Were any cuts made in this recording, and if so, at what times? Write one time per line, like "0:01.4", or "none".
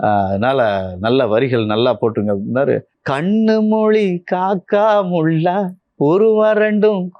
0:03.0